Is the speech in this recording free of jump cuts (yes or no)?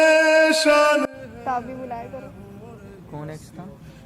yes